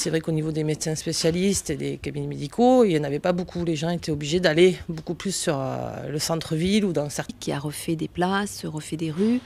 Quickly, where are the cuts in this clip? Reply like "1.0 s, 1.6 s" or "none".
none